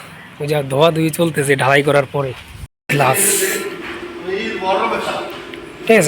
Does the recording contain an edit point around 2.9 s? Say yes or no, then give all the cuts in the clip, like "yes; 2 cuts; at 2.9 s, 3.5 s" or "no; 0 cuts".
yes; 1 cut; at 2.9 s